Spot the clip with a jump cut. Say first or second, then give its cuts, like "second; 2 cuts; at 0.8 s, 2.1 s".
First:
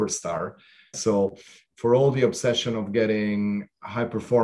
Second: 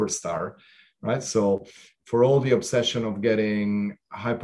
first; 1 cut; at 1.0 s